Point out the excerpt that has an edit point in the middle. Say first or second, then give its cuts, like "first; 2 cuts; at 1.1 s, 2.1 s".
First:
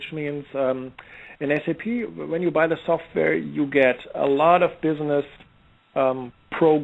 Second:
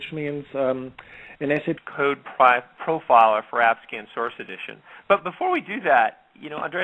first; 1 cut; at 1.8 s